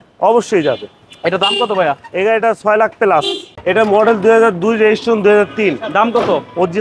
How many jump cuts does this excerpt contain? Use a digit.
1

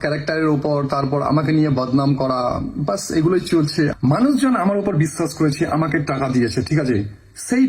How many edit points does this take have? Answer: 1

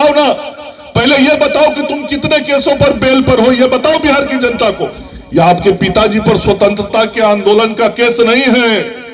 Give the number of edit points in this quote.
1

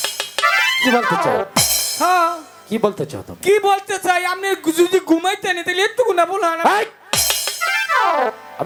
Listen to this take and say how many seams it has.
0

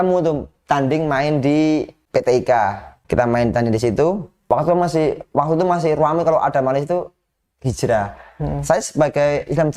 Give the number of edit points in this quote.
3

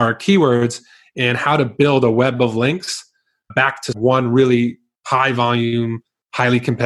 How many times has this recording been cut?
1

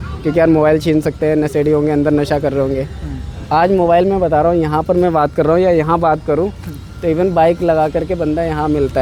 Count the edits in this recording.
0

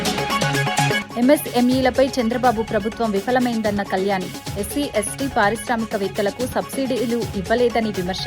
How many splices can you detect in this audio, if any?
1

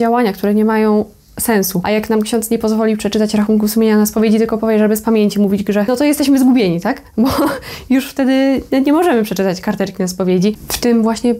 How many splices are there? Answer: 3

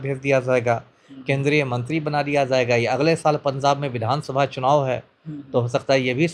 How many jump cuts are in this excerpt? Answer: 0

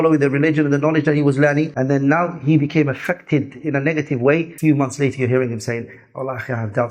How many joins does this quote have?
2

